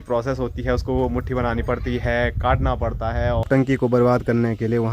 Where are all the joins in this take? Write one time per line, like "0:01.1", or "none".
0:03.5